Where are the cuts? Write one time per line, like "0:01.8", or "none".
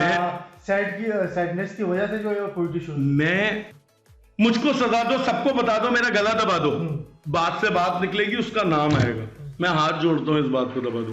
0:03.7